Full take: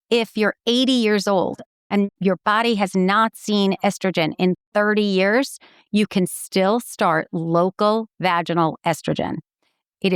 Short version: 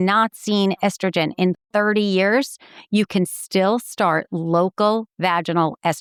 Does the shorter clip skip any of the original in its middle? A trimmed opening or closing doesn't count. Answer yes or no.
no